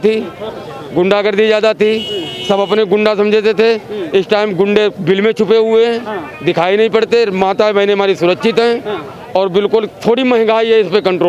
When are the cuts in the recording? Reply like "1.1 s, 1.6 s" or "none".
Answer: none